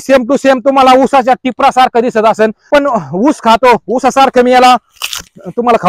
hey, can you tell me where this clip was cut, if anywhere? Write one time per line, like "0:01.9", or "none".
0:02.7